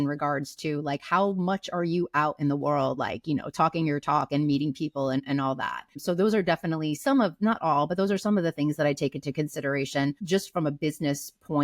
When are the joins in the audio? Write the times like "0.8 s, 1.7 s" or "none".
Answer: none

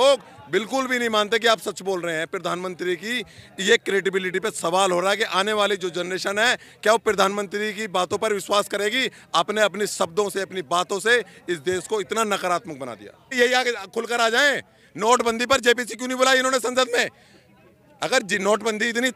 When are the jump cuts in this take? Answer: 13.4 s

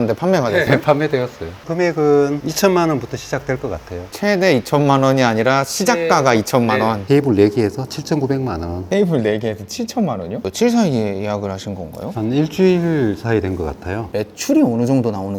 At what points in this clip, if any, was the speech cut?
7.0 s

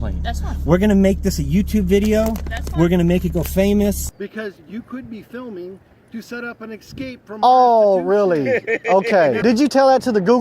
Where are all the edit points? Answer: 4.1 s, 9.4 s

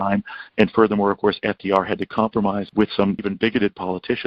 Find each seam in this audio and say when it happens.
3.0 s

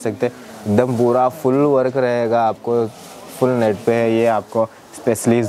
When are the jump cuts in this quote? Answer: none

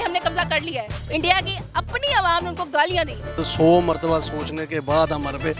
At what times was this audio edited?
1.0 s, 3.4 s

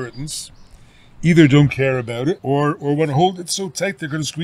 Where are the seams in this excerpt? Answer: 2.4 s

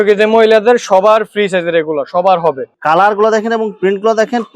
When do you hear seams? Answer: 2.7 s

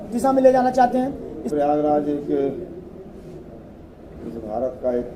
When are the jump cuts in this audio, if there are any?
1.5 s

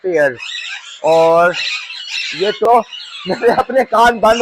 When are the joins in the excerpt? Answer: 2.6 s

